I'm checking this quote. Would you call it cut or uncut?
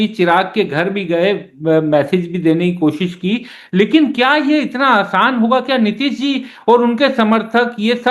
uncut